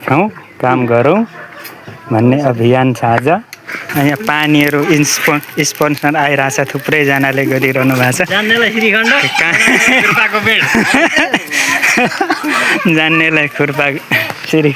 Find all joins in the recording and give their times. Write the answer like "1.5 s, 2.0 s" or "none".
3.9 s